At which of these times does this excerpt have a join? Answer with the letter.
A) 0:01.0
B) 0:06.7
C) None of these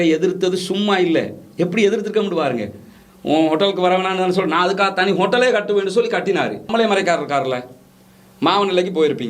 B